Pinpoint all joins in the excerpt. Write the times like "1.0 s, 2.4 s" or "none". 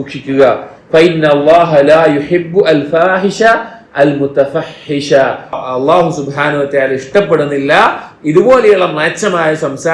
5.6 s